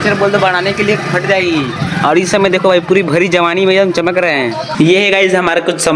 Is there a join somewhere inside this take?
no; 0 cuts

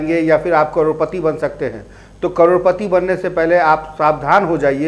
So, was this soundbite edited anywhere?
no; 0 cuts

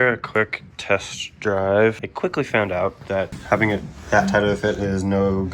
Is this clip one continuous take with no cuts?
no; 2 cuts; at 2.1 s, 3.4 s

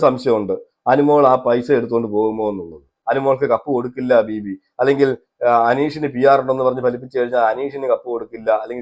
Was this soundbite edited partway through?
yes; 1 cut; at 2.9 s

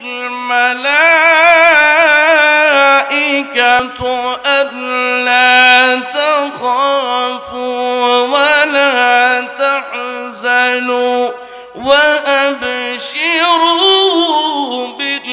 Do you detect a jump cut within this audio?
yes; 1 cut; at 3.8 s

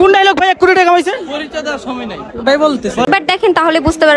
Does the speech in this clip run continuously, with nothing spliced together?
no; 1 cut; at 3.1 s

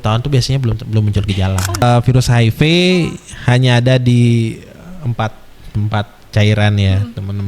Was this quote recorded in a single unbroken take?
no; 1 cut; at 1.8 s

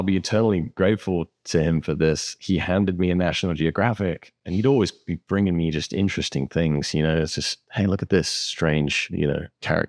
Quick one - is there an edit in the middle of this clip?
no; 0 cuts

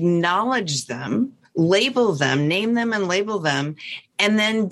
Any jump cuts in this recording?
no; 0 cuts

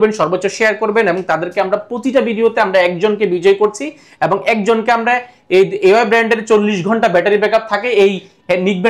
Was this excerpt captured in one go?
yes; 0 cuts

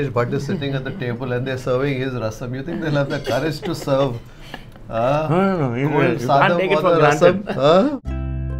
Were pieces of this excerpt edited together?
no; 0 cuts

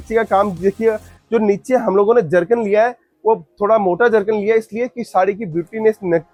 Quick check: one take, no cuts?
yes; 0 cuts

